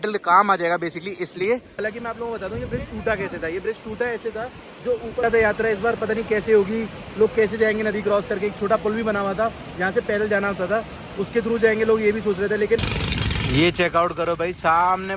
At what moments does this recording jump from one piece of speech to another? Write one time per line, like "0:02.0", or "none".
0:01.7
0:05.2
0:12.8